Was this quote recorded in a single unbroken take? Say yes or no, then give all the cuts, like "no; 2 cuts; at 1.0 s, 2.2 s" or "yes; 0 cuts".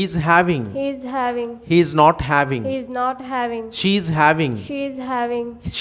yes; 0 cuts